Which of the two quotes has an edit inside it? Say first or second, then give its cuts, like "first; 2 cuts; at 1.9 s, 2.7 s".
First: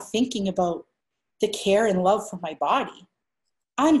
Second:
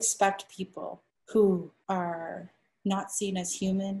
second; 1 cut; at 1.7 s